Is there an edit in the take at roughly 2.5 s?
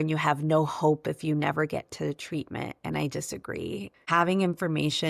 no; 1 cut; at 3.9 s

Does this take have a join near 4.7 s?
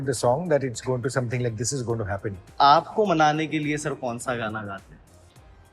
no; 1 cut; at 2.5 s

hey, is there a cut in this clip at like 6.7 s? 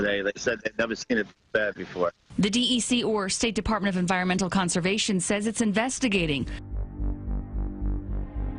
yes; 1 cut; at 6.7 s

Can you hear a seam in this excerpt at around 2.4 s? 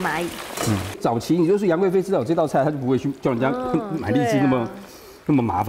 no; 1 cut; at 0.9 s

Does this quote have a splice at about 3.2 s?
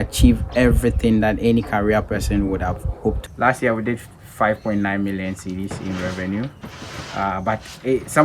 yes; 1 cut; at 3.2 s

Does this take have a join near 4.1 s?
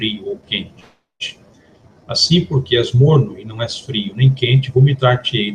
yes; 1 cut; at 4.1 s

